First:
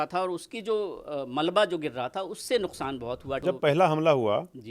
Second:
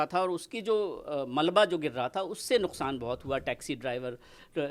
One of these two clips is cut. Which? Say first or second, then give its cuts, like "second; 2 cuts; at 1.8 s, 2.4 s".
first; 1 cut; at 3.4 s